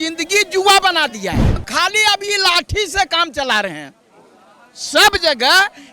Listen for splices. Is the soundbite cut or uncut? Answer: cut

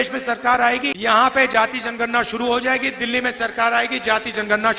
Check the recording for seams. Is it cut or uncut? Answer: cut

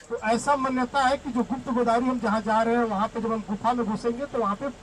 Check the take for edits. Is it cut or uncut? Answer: uncut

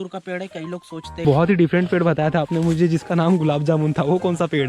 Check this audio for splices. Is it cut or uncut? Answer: cut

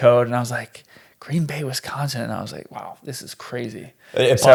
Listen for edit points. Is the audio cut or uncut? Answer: uncut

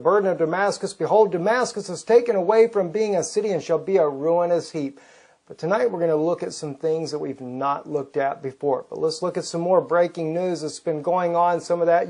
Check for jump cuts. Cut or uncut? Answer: cut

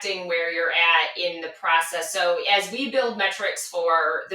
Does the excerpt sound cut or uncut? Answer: cut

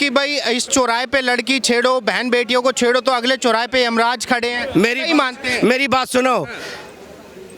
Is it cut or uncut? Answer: uncut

